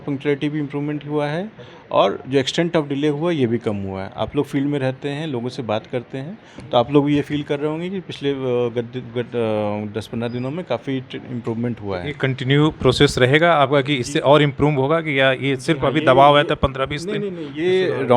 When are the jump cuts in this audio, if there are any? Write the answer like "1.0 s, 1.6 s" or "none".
none